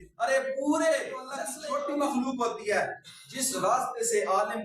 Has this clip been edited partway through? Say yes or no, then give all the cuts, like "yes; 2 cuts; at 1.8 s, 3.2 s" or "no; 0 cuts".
yes; 1 cut; at 1.4 s